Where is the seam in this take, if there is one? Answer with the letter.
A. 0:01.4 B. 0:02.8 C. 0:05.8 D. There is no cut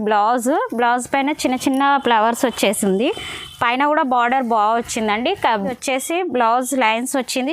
C